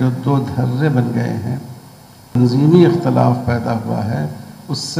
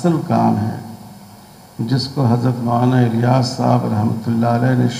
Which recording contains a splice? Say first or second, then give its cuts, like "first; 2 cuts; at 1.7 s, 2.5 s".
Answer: first; 1 cut; at 2.4 s